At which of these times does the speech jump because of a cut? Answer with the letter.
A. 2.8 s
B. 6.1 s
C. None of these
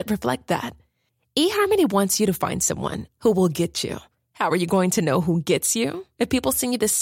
C